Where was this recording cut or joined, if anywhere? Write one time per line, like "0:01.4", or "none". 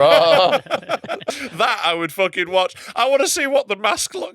0:01.3